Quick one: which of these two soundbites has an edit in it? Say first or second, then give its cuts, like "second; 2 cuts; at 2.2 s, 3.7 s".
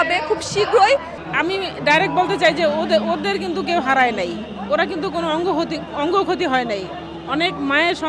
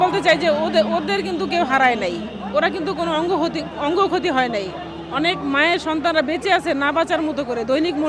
first; 1 cut; at 1.2 s